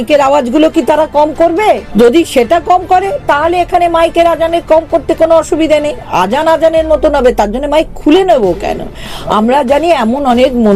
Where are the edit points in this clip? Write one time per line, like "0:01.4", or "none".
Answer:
0:01.9